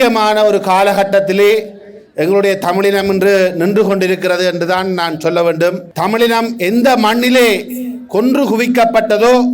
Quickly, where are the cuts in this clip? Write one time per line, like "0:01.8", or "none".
0:05.9